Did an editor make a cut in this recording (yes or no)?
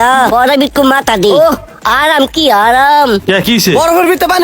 yes